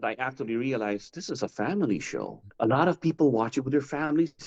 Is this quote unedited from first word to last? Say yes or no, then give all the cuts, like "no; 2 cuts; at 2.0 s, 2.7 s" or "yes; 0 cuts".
no; 1 cut; at 2.4 s